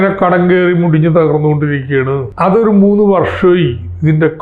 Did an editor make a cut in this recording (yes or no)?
yes